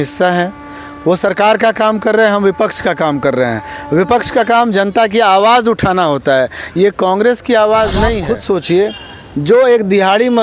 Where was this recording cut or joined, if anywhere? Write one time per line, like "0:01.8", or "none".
0:08.3